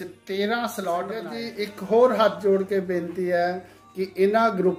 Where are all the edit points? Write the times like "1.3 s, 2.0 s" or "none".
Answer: 1.4 s